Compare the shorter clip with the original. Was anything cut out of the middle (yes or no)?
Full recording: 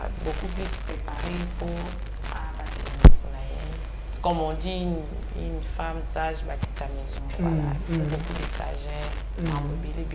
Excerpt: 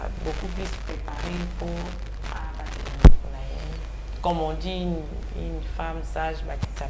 no